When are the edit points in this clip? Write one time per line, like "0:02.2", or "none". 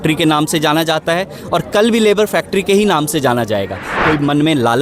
0:03.9